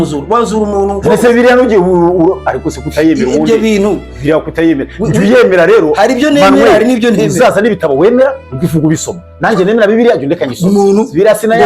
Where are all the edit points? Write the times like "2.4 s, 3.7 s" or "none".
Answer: none